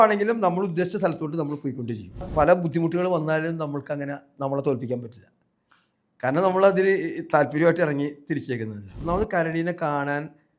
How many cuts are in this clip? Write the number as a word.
two